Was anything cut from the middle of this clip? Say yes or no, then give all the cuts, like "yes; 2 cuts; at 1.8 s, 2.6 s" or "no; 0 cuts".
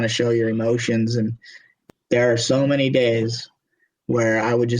yes; 1 cut; at 1.7 s